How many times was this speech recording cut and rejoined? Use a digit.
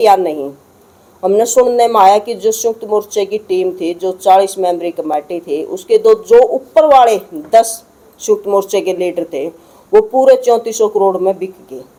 0